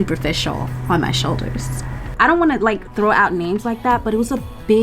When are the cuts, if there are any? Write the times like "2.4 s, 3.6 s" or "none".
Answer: 2.1 s